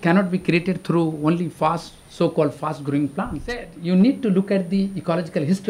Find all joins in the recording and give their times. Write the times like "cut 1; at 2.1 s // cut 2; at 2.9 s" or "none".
cut 1; at 3.7 s

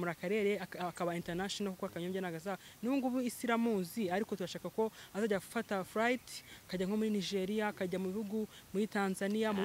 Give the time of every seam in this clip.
none

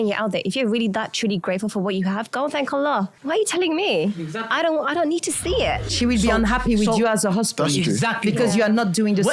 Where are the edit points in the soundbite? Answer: cut 1; at 3.2 s // cut 2; at 5.9 s

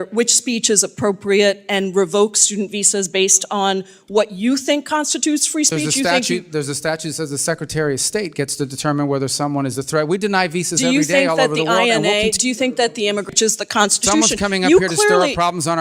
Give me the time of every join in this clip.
cut 1; at 13.3 s

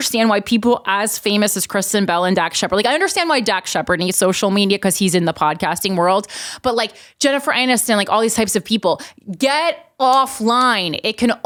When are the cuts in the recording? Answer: none

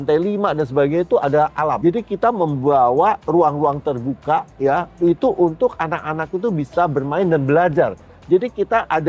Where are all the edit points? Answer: none

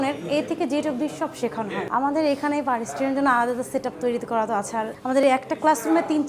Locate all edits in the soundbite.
cut 1; at 1.9 s // cut 2; at 5.0 s

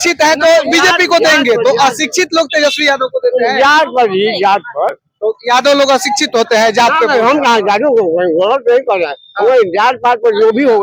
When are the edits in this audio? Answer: none

